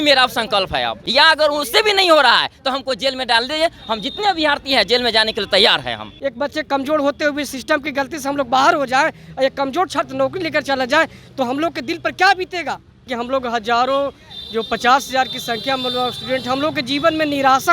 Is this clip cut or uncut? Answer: cut